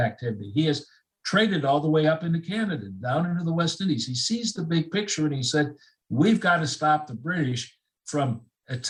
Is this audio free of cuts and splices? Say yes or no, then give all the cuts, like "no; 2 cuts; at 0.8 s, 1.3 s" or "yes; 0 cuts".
yes; 0 cuts